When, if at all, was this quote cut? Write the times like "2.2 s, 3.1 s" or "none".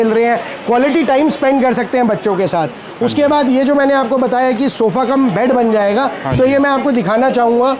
none